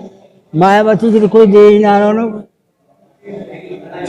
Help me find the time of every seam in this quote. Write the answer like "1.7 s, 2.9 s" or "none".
none